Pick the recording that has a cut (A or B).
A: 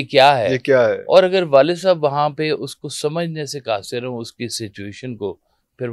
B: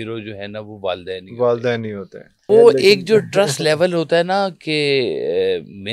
B